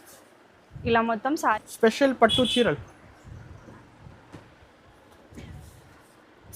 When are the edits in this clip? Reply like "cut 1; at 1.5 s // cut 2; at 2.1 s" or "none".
cut 1; at 1.5 s